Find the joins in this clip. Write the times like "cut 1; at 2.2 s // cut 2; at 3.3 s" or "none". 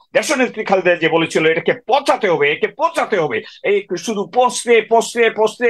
none